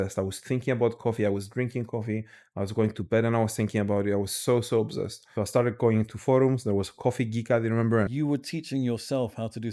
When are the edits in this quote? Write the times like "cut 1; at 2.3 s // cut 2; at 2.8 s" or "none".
cut 1; at 5.2 s // cut 2; at 8.1 s